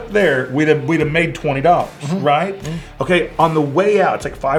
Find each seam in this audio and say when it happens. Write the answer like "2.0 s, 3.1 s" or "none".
none

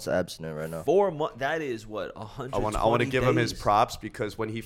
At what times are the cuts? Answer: none

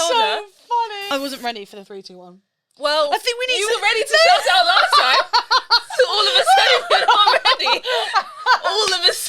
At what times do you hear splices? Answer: 1.0 s

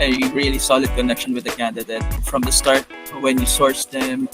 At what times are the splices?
2.2 s

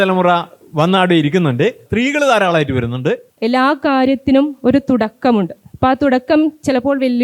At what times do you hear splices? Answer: 1.9 s, 3.3 s

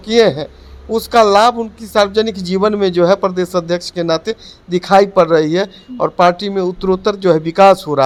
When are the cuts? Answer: none

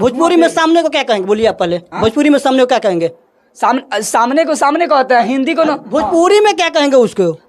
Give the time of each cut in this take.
none

